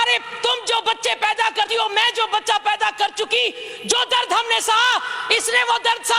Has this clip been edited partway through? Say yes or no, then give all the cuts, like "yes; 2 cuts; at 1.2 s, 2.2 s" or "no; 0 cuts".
no; 0 cuts